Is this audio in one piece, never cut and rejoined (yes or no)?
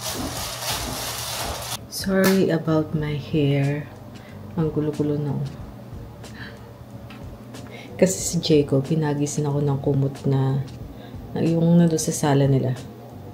no